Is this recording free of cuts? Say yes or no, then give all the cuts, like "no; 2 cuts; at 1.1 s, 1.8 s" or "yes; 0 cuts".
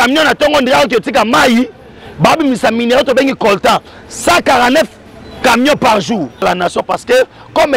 no; 1 cut; at 6.4 s